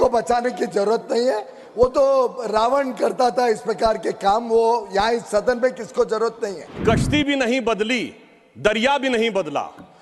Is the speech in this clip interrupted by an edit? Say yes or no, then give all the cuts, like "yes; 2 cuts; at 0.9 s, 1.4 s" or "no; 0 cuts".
yes; 1 cut; at 6.8 s